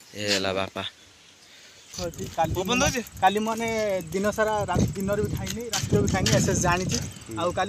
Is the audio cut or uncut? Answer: cut